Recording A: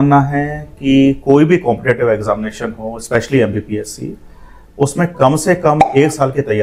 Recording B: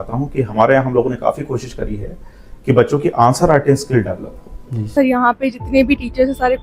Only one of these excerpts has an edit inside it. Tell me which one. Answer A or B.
B